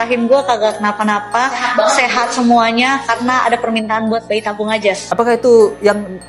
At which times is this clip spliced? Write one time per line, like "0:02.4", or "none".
0:05.0

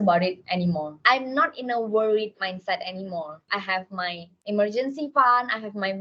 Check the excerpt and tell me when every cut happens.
0:01.0
0:03.4

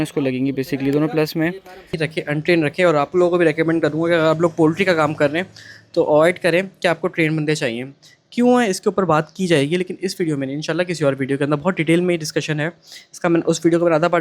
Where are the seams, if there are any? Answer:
0:01.9

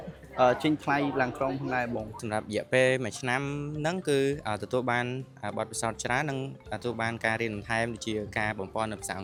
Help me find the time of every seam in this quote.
none

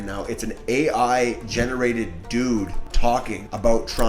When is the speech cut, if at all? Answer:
0:03.1

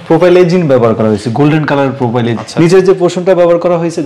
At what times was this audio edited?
0:02.4

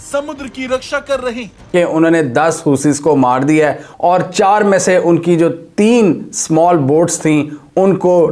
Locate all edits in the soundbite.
0:01.6

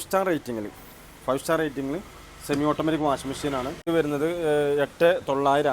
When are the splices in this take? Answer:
0:03.8

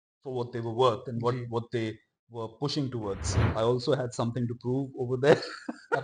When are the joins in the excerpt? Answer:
0:03.5

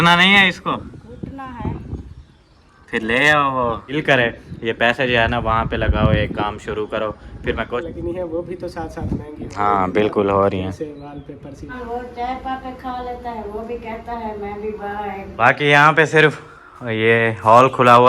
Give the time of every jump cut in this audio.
0:03.9
0:07.8
0:11.7
0:15.3

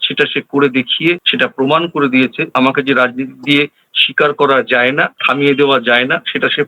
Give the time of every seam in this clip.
0:01.3
0:02.5

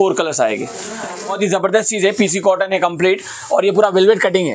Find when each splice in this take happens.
0:01.3

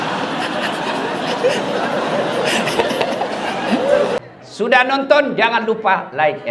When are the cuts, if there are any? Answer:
0:04.2

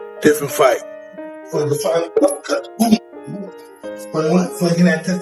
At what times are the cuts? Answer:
0:01.0

